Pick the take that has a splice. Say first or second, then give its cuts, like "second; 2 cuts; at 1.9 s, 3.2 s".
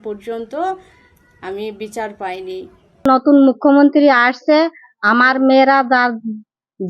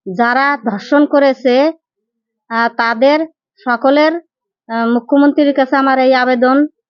first; 1 cut; at 3.1 s